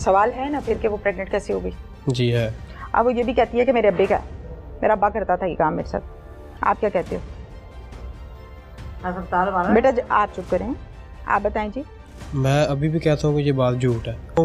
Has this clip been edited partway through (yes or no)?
no